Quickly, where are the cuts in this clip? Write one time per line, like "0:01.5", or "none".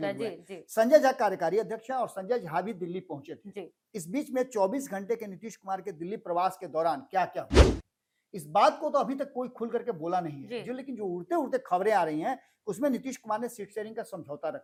none